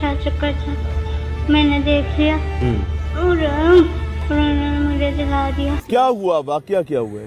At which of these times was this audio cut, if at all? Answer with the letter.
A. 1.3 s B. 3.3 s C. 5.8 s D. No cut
C